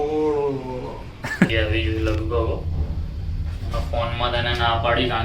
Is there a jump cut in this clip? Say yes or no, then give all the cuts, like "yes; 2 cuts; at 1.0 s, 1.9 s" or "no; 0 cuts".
yes; 1 cut; at 1.5 s